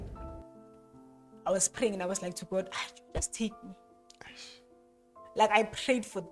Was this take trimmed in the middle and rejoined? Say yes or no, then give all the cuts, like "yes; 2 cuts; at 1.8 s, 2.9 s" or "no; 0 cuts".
no; 0 cuts